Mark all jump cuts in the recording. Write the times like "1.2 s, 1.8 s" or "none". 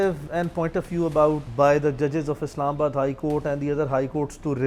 1.5 s